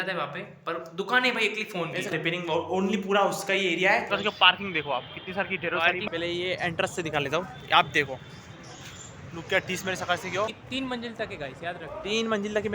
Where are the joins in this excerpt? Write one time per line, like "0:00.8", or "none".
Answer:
0:02.1
0:04.1
0:06.0
0:10.6